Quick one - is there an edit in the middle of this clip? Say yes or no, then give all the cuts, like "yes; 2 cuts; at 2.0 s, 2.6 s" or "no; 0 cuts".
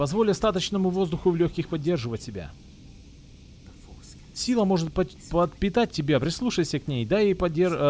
no; 0 cuts